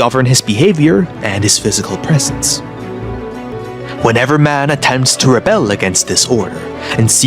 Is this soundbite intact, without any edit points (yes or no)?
no